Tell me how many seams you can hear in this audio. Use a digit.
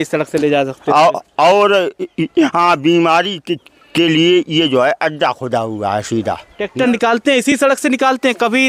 1